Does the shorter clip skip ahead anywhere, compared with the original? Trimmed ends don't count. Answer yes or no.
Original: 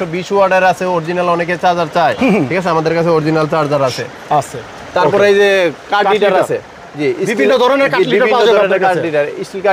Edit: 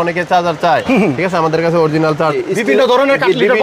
yes